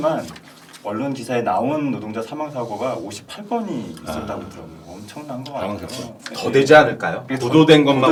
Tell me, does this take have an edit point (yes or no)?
no